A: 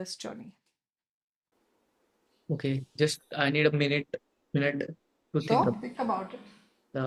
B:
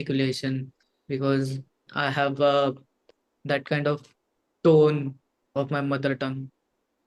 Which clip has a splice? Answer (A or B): B